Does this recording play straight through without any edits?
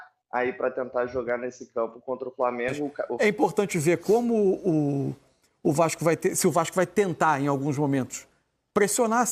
no; 1 cut; at 3.1 s

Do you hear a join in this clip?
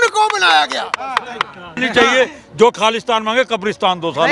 yes; 1 cut; at 1.7 s

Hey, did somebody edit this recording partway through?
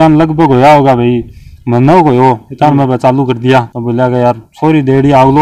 no; 0 cuts

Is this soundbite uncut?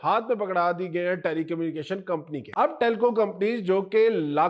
no; 1 cut; at 2.4 s

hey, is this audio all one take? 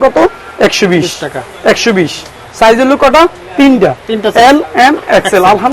yes; 0 cuts

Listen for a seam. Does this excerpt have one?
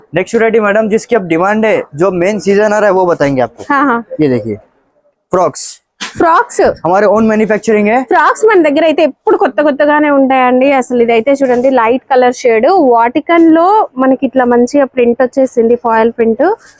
no; 0 cuts

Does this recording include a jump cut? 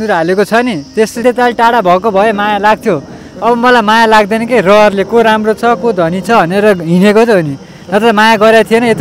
yes; 1 cut; at 1.2 s

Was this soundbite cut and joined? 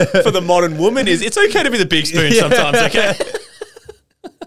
no; 0 cuts

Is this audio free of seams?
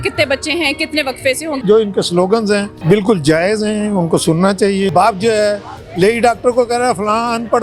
no; 2 cuts; at 1.6 s, 4.9 s

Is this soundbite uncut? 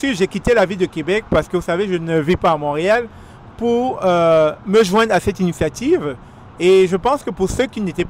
yes; 0 cuts

